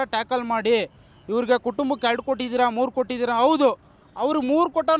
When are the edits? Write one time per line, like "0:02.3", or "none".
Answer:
none

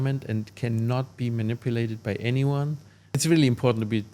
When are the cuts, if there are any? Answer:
0:03.2

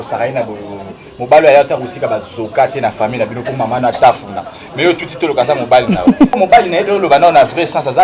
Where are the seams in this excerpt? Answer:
0:06.4

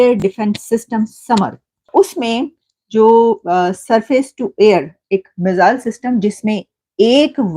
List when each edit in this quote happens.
0:01.9

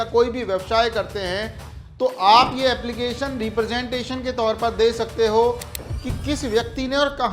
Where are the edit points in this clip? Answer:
0:05.8

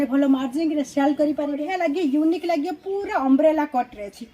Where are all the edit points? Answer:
0:01.6

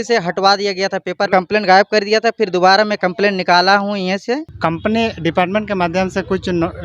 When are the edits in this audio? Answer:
0:01.3
0:04.5

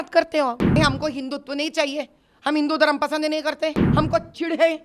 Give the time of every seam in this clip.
0:00.8
0:03.8

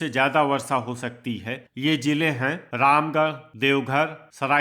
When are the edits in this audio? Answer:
0:02.6
0:03.4

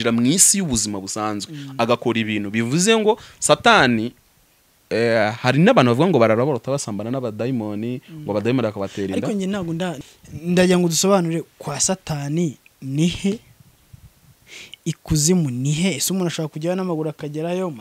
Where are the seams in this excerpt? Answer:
0:10.0

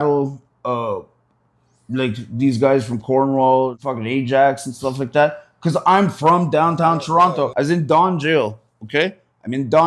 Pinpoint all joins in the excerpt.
0:03.8
0:07.5

